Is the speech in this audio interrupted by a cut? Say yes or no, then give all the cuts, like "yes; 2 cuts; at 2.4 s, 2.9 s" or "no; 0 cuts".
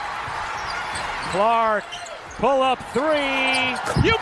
no; 0 cuts